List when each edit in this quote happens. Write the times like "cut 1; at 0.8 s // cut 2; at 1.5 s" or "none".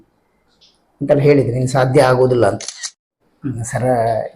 cut 1; at 3.1 s